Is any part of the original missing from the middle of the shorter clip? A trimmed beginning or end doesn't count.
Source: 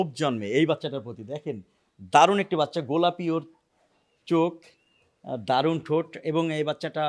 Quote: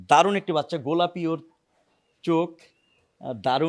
no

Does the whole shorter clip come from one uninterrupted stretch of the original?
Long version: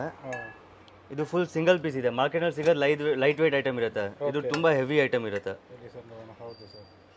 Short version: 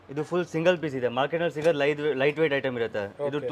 yes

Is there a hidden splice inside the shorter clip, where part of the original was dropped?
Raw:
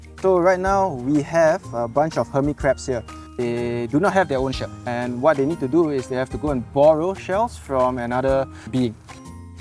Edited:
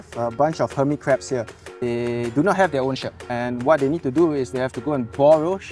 no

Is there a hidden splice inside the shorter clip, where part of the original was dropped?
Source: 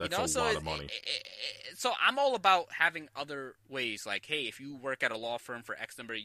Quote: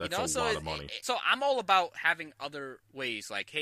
yes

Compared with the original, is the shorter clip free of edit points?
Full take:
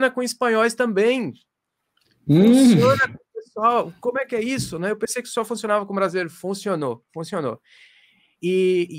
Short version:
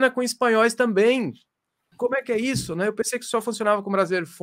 no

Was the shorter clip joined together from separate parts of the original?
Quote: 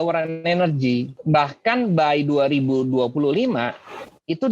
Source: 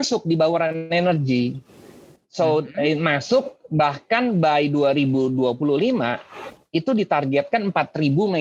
yes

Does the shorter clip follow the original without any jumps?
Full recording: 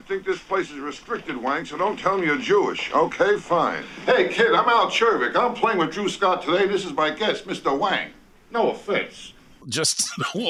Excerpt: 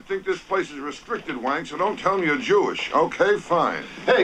yes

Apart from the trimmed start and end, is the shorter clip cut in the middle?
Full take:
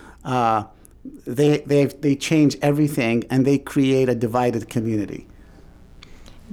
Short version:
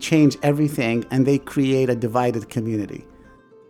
no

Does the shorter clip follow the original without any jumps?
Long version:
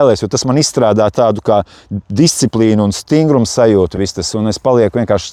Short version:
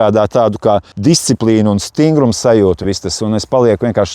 no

